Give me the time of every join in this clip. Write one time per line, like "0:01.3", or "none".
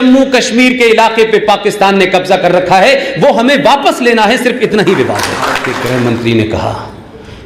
0:05.7